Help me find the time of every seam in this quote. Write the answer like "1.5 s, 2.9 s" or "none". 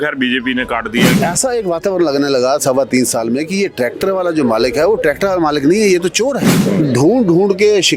1.1 s, 6.6 s

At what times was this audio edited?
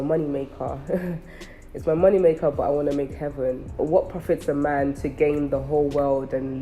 3.7 s

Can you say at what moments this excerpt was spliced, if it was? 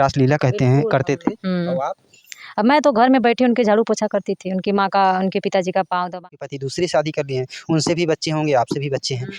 6.3 s

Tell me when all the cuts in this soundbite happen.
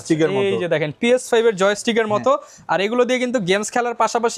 none

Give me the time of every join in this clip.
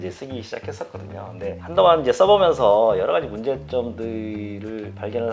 none

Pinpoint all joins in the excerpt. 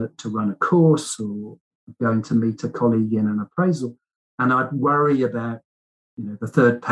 none

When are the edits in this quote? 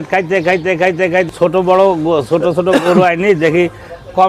1.3 s

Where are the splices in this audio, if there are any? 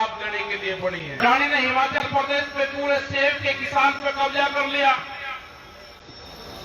none

